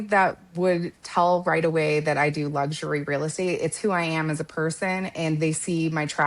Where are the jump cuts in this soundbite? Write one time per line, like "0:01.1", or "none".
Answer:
none